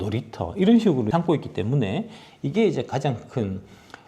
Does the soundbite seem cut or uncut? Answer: cut